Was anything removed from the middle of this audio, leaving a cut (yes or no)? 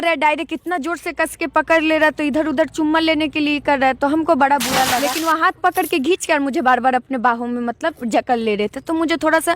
yes